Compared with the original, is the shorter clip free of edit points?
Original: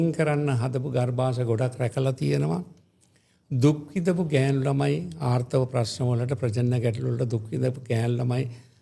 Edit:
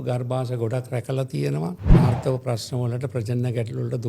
no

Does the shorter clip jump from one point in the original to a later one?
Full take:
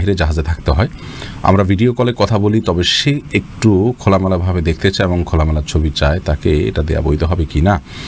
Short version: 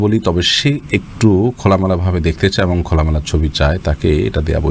no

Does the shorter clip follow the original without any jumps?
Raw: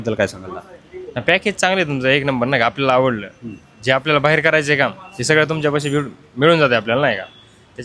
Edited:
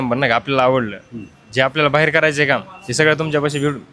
yes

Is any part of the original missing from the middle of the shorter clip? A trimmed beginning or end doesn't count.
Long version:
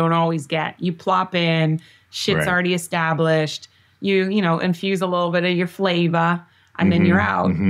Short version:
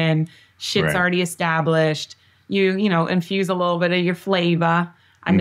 no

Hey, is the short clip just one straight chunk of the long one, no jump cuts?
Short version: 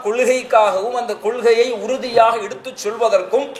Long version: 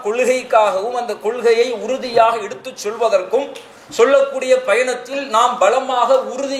yes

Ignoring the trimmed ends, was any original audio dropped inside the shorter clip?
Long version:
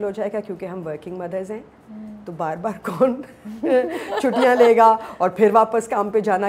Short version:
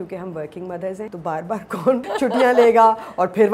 yes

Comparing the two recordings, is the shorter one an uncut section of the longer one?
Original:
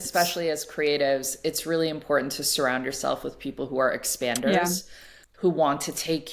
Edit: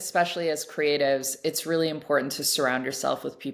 yes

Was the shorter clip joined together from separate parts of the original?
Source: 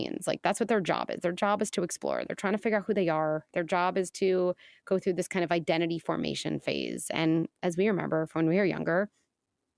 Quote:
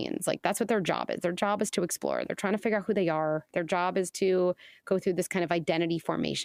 no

